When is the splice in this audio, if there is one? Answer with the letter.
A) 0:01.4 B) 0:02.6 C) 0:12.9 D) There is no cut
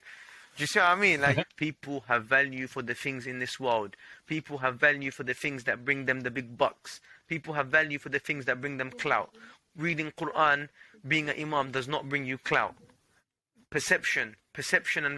A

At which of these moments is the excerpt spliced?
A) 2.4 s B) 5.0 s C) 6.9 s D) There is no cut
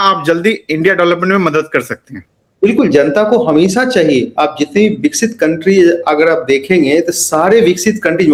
D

